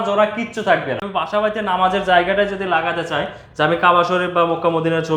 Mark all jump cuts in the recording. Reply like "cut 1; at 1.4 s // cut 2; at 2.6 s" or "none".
cut 1; at 1.0 s